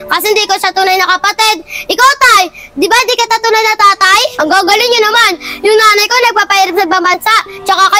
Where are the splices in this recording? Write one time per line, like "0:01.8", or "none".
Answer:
0:04.3

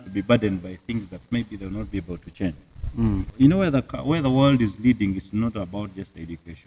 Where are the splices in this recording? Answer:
0:03.2

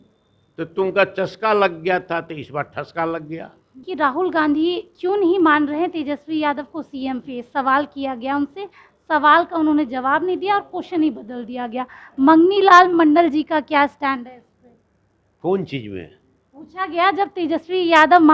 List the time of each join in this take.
0:03.9

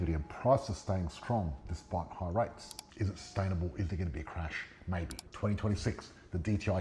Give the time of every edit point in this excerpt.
0:02.9
0:05.2

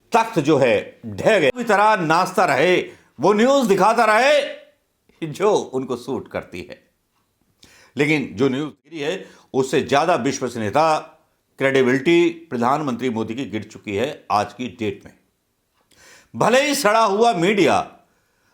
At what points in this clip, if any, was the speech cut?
0:01.5
0:09.1

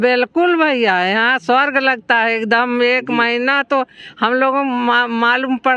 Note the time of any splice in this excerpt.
none

